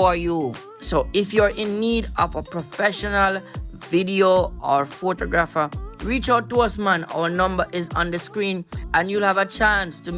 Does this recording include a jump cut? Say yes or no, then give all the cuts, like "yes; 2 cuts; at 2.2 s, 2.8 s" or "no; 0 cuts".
no; 0 cuts